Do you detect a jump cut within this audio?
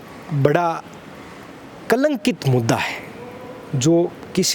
no; 0 cuts

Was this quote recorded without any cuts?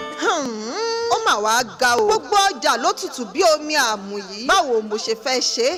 yes; 0 cuts

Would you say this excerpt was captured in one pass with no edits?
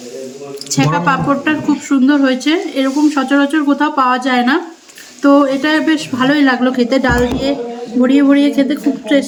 yes; 0 cuts

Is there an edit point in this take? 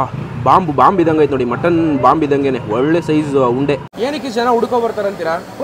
yes; 1 cut; at 3.9 s

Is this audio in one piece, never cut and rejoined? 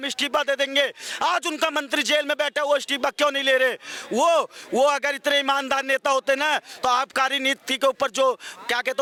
yes; 0 cuts

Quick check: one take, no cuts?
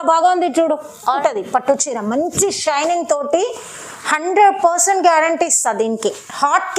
no; 1 cut; at 1.1 s

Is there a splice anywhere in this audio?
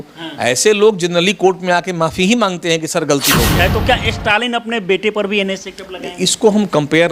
yes; 1 cut; at 3.6 s

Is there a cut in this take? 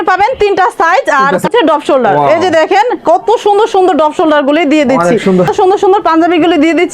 yes; 2 cuts; at 1.5 s, 5.5 s

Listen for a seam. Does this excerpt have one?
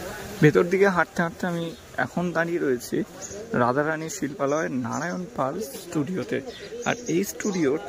no; 0 cuts

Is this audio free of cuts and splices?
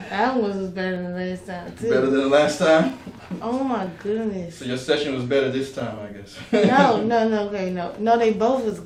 yes; 0 cuts

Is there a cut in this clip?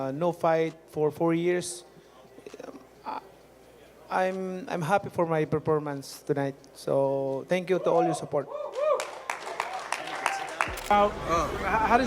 yes; 1 cut; at 10.8 s

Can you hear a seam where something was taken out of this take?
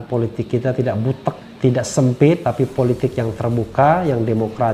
yes; 1 cut; at 1.5 s

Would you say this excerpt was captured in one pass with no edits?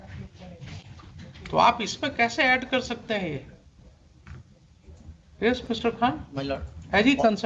yes; 0 cuts

